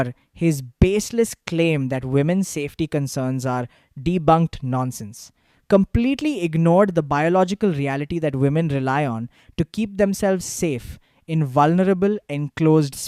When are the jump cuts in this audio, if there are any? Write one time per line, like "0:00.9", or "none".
none